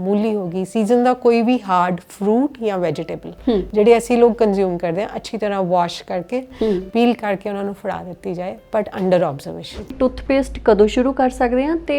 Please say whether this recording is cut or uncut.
cut